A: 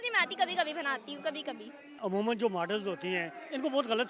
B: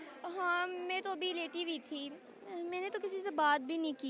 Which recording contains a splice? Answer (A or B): A